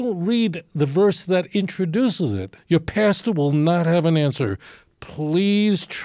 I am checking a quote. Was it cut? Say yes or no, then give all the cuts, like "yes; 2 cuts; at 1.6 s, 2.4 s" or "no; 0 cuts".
yes; 1 cut; at 2.5 s